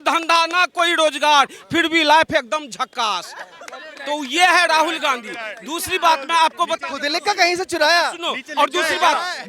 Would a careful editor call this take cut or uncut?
uncut